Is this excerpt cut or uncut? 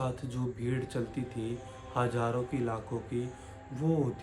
uncut